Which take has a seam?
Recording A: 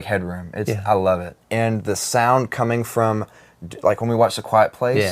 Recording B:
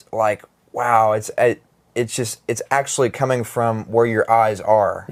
A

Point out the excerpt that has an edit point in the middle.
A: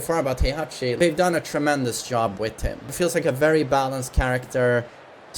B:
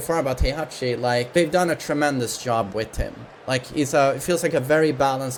A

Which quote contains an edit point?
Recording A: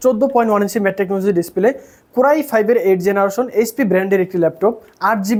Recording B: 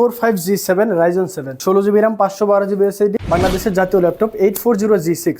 B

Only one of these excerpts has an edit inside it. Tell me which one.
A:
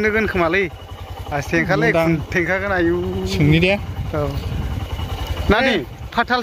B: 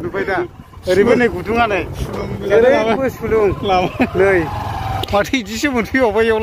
B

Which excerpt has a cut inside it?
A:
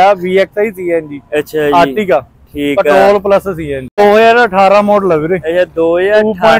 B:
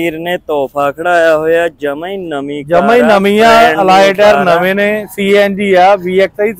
A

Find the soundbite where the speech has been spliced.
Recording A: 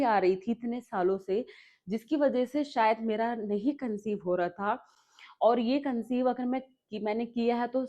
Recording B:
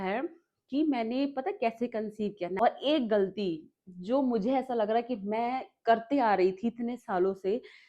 B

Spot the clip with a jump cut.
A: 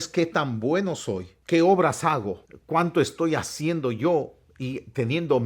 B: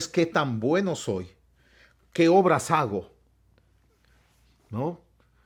A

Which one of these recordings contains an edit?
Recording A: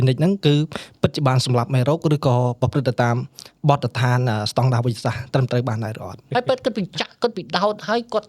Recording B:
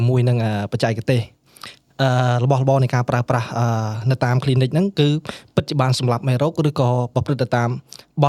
A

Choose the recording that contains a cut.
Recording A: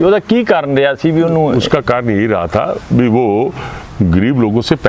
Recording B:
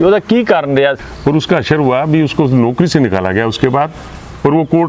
B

